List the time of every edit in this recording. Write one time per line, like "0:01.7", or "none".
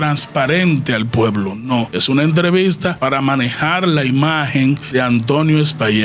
0:01.9
0:03.0
0:04.8